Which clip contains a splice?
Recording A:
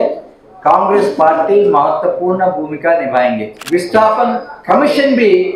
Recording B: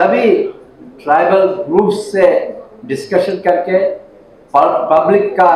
A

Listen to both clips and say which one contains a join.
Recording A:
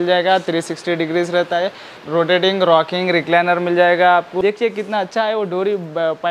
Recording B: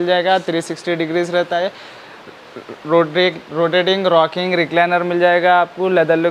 A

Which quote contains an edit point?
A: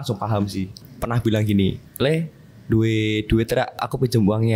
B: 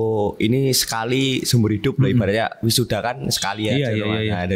A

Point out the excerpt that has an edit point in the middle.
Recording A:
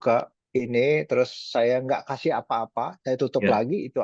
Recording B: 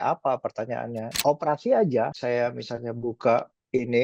B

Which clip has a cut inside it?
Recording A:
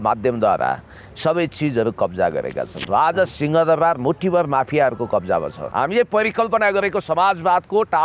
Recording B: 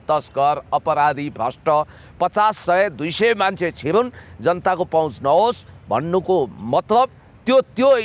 A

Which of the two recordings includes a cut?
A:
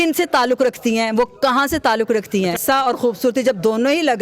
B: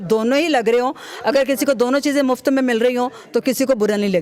A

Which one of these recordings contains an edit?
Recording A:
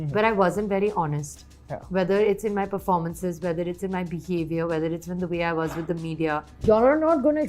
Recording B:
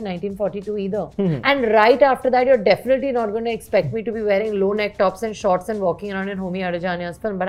A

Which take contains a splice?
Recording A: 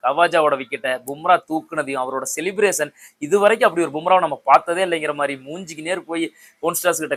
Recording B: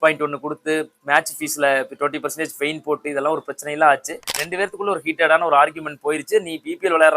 B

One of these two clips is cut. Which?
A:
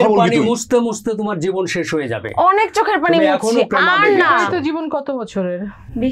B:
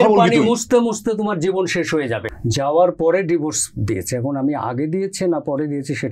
B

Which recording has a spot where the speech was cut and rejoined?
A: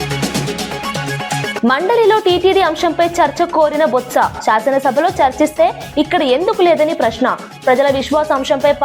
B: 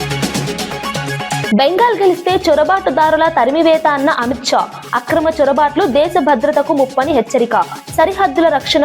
B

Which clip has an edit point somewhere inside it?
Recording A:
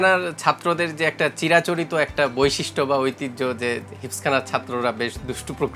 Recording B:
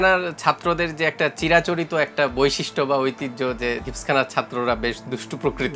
B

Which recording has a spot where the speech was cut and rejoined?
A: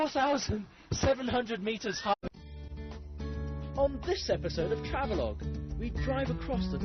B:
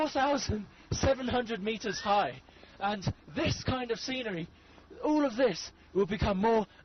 B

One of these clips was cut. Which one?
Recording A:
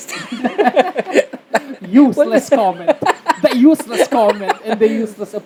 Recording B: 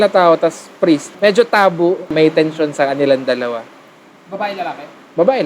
B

